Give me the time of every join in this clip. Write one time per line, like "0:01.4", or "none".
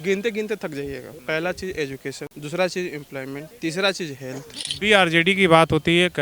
0:01.1
0:02.3
0:03.5
0:04.6